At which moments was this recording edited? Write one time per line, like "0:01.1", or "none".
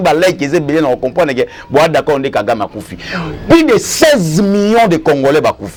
none

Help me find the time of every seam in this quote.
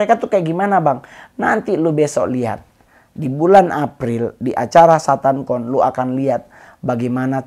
none

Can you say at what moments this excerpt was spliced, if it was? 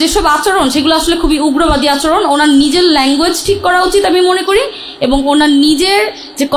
none

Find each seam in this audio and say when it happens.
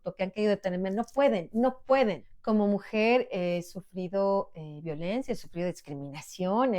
0:02.3

